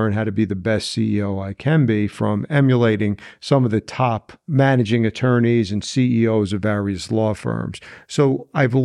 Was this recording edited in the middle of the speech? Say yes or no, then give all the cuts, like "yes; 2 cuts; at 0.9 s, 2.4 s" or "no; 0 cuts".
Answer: yes; 1 cut; at 4.3 s